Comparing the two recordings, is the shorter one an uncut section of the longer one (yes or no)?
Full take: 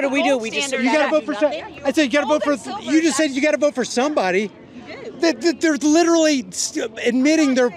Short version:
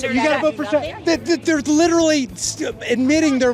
no